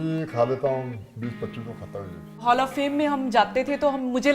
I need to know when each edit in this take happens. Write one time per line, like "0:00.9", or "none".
0:02.4